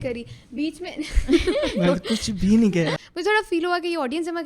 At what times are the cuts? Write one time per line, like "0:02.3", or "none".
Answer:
0:03.0